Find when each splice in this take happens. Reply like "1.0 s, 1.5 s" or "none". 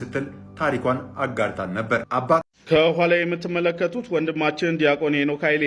2.5 s